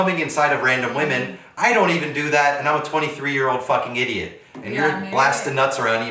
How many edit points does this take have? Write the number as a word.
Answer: zero